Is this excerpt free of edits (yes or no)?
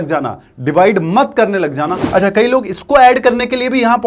no